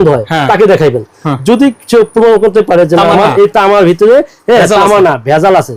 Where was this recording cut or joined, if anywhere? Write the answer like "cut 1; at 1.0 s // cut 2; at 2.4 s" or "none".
none